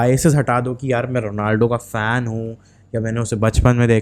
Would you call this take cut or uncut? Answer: uncut